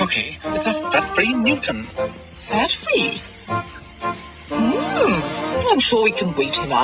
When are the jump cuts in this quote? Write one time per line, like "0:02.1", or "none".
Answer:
none